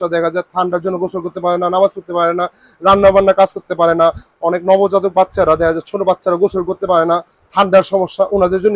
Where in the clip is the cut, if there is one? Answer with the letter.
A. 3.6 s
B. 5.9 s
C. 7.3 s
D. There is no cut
D